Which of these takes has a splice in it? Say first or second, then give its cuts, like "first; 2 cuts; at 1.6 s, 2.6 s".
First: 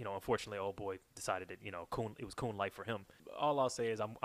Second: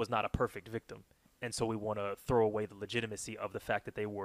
first; 1 cut; at 3.2 s